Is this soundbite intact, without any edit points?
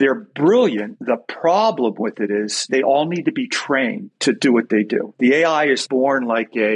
no; 5 cuts; at 0.9 s, 2.7 s, 4.1 s, 5.1 s, 5.8 s

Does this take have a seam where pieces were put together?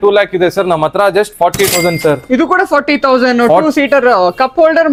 no; 0 cuts

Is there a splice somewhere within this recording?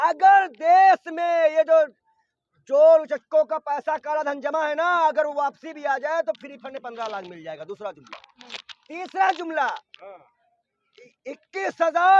no; 0 cuts

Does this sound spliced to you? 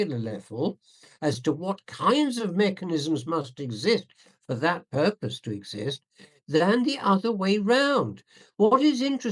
no; 0 cuts

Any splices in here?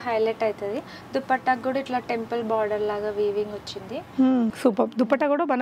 yes; 1 cut; at 4.6 s

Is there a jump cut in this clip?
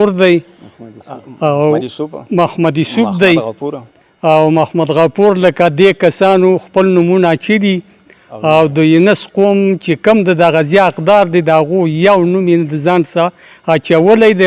no; 0 cuts

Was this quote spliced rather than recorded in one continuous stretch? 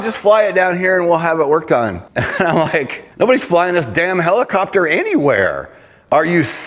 yes; 2 cuts; at 2.1 s, 3.0 s

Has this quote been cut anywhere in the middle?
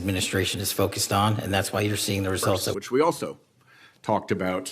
yes; 1 cut; at 2.8 s

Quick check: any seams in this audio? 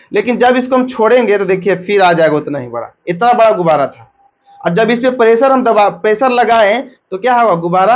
no; 0 cuts

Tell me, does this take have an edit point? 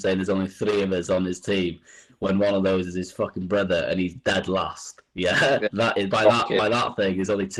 no; 0 cuts

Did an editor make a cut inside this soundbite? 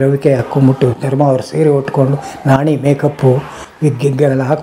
no; 0 cuts

